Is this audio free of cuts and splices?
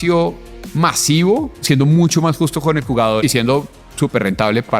no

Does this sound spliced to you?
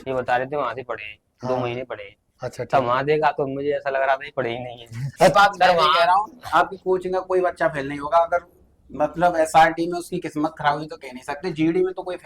yes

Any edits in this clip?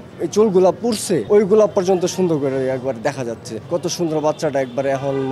yes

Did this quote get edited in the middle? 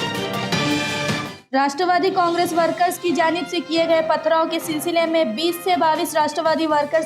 yes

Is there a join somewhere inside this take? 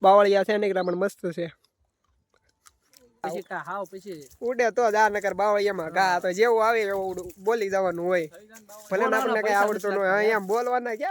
yes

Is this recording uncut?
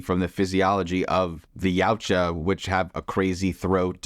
no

